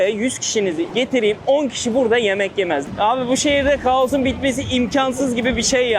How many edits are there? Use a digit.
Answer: 1